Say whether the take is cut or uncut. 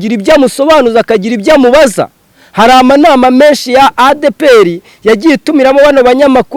uncut